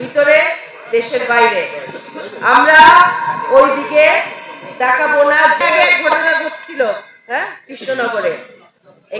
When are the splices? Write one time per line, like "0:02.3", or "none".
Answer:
0:05.6